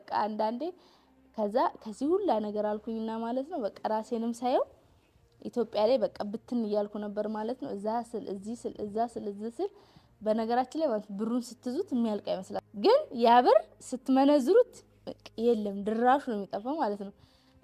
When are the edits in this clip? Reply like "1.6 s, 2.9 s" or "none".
12.6 s